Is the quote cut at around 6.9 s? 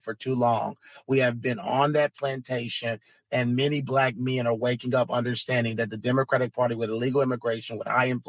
no; 0 cuts

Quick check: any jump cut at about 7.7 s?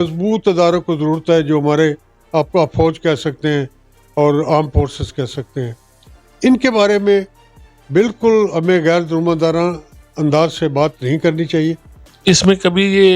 no; 1 cut; at 12.1 s

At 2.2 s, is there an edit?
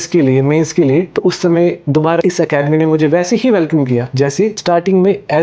yes; 3 cuts; at 1.1 s, 2.2 s, 4.4 s

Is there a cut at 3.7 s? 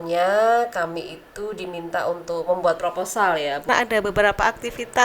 yes; 1 cut; at 3.7 s

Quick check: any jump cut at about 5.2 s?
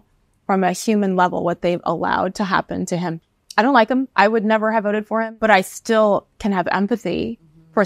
yes; 1 cut; at 5.2 s

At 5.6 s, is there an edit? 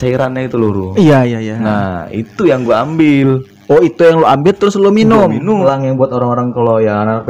yes; 1 cut; at 5.6 s

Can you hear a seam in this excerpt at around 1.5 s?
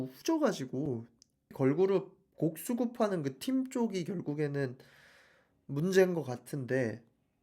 yes; 1 cut; at 1.5 s

